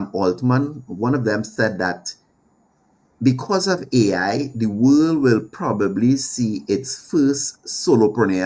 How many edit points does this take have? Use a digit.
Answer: 0